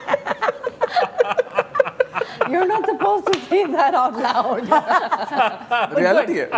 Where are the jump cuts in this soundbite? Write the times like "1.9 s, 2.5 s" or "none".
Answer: none